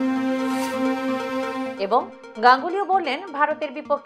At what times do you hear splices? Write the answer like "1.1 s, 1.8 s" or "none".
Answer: none